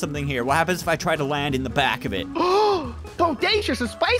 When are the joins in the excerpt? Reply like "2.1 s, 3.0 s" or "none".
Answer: none